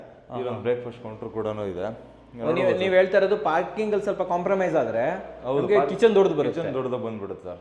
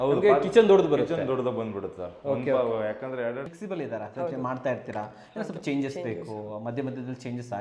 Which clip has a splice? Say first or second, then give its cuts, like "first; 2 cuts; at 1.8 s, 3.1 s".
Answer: second; 1 cut; at 3.5 s